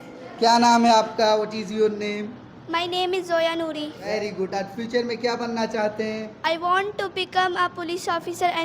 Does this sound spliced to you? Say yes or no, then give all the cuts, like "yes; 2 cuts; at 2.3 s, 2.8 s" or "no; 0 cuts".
yes; 1 cut; at 4.1 s